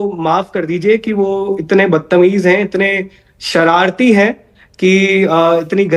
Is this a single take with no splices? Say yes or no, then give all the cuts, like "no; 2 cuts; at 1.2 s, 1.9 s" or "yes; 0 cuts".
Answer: yes; 0 cuts